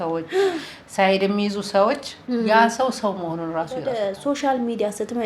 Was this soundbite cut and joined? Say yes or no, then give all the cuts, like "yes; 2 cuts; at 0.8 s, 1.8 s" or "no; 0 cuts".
yes; 1 cut; at 3.8 s